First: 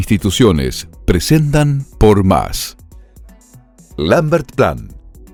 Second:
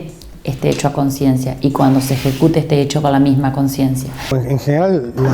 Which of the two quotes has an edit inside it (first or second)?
second